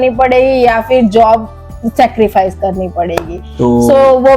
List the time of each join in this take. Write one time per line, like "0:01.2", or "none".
none